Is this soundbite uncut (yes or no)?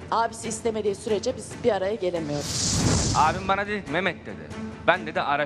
no